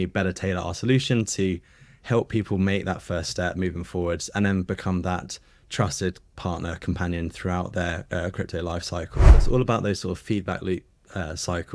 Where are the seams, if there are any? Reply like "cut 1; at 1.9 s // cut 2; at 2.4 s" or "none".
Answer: cut 1; at 9.3 s